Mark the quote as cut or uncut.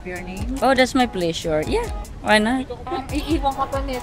cut